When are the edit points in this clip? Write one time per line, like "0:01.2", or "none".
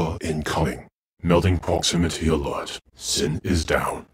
0:01.1